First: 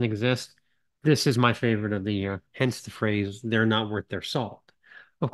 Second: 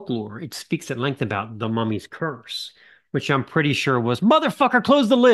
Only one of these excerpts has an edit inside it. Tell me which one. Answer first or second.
first